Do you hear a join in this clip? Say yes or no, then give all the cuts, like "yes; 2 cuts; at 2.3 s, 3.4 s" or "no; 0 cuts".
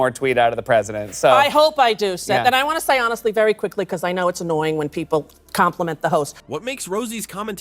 no; 0 cuts